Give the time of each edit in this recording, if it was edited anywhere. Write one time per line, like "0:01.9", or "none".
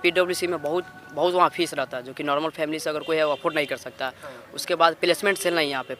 none